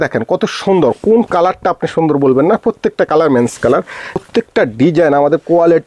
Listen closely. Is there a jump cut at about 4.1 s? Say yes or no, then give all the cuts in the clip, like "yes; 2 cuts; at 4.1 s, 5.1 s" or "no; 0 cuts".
yes; 1 cut; at 4.1 s